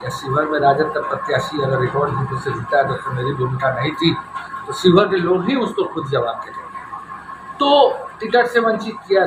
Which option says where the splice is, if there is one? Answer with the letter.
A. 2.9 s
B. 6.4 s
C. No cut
C